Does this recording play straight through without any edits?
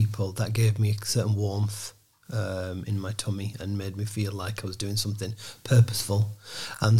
yes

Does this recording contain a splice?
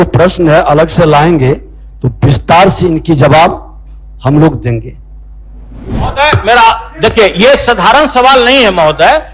yes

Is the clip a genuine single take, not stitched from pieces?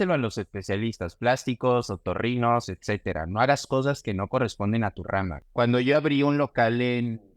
no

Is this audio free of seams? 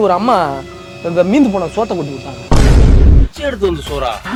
yes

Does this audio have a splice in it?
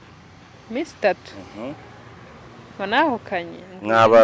yes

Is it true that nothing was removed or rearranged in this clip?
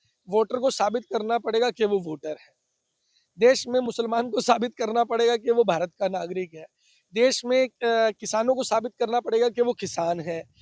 yes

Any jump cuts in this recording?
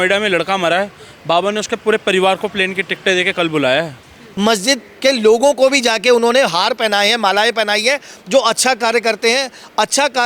yes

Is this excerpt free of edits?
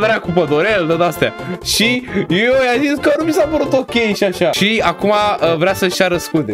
no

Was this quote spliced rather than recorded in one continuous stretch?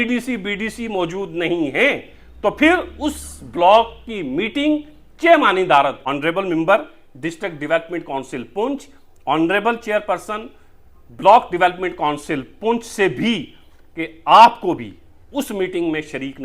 yes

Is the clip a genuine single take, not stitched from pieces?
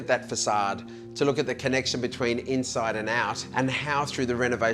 no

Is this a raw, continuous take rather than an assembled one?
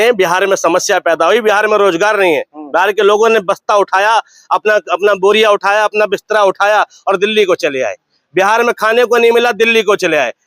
yes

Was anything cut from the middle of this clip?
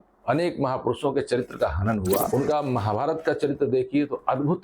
yes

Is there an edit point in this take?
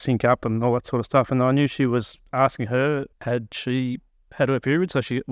no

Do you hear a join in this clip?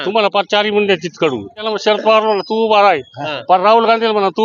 yes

